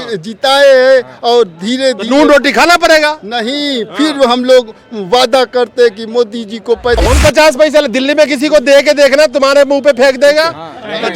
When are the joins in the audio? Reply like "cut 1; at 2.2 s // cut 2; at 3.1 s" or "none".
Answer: cut 1; at 7.0 s